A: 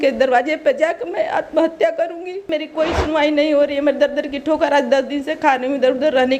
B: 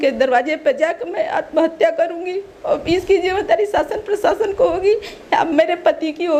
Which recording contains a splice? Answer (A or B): A